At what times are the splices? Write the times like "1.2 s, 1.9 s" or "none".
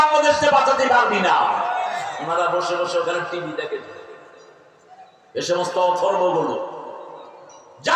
2.0 s